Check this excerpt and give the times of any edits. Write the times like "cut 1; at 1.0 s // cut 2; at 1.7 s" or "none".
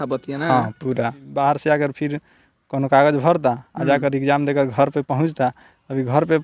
cut 1; at 1.3 s